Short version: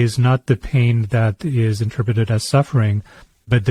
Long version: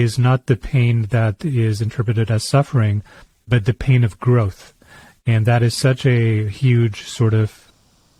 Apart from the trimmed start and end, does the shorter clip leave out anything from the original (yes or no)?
no